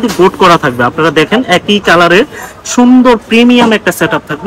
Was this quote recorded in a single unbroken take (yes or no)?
yes